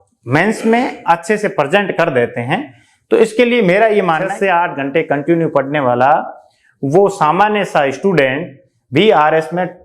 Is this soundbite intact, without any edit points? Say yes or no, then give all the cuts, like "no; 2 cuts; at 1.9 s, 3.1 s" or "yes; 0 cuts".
no; 1 cut; at 4.3 s